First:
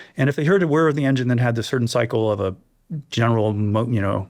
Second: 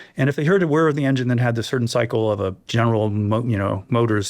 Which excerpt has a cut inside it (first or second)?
second